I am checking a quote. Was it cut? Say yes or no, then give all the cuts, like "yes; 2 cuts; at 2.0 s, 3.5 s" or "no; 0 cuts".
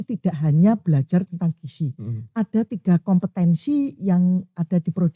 no; 0 cuts